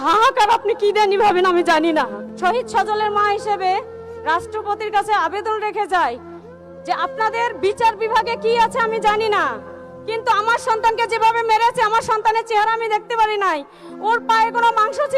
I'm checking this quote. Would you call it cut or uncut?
cut